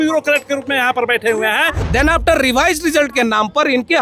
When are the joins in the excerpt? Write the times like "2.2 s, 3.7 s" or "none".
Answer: 1.8 s